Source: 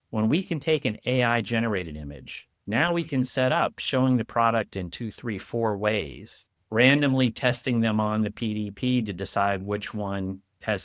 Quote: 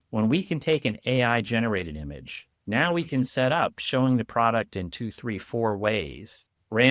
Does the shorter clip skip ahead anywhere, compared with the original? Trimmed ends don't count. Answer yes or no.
no